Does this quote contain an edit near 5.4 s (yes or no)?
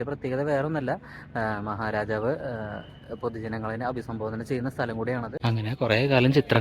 yes